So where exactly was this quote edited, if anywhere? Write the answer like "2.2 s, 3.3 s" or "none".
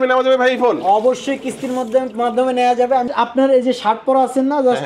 3.1 s